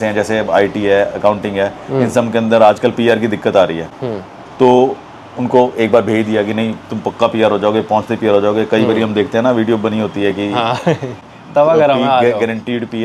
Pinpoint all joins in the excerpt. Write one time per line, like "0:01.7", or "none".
none